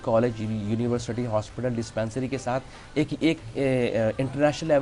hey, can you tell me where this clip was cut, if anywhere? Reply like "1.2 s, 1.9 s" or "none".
none